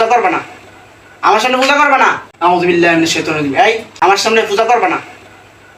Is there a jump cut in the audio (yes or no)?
yes